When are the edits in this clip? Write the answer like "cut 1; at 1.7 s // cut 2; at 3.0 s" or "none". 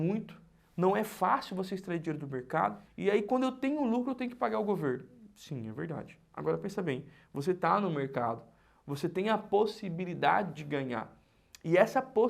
cut 1; at 2.9 s